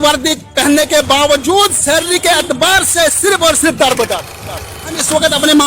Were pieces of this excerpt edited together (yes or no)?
yes